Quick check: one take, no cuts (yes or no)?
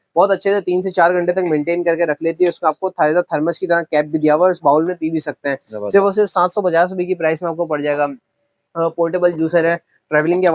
yes